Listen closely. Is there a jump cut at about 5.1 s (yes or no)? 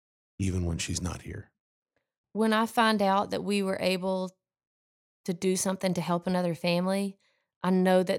no